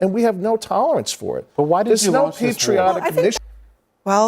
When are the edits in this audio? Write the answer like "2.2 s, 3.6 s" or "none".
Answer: 3.4 s